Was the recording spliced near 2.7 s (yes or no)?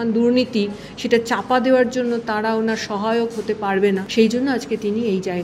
no